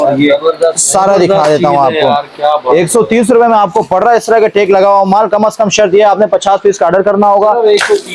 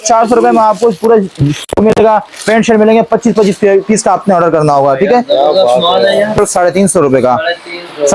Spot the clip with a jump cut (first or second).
second